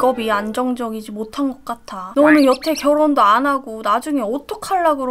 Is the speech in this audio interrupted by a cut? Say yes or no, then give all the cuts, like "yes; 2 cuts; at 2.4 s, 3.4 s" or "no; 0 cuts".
yes; 1 cut; at 2.1 s